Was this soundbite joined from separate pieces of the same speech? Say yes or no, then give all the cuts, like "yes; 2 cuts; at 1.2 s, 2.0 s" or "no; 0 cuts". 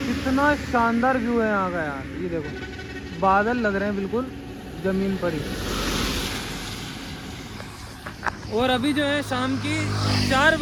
no; 0 cuts